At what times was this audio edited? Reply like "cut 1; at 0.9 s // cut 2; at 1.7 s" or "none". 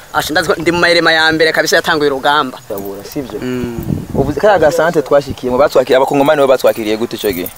cut 1; at 2.6 s